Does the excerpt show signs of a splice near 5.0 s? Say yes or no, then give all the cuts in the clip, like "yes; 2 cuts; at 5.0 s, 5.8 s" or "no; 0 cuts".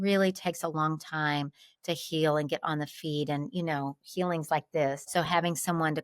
yes; 1 cut; at 5.0 s